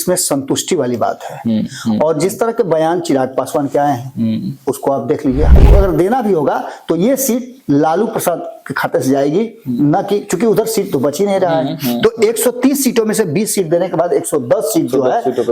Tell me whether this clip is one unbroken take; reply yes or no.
no